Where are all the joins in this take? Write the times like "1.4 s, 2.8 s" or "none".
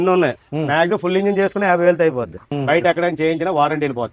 2.5 s